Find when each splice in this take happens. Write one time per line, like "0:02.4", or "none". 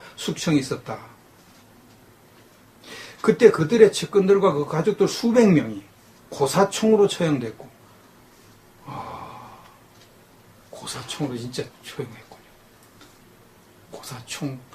0:04.2